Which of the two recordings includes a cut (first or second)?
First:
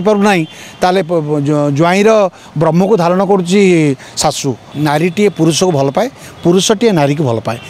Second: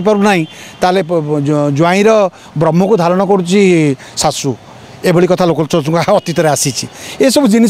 first